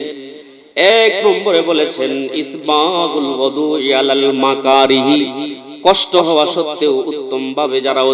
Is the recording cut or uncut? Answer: uncut